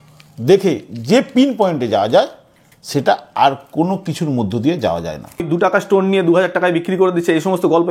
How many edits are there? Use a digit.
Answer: 1